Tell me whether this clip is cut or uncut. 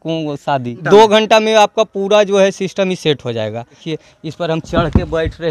cut